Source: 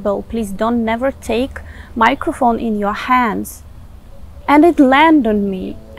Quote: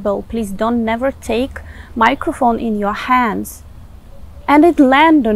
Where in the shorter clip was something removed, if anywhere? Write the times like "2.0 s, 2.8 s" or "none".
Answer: none